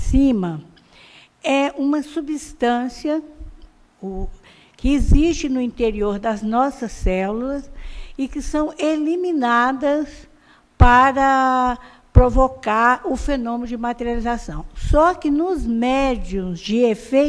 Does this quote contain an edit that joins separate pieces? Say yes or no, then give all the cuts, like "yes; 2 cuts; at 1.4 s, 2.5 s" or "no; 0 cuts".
yes; 1 cut; at 0.9 s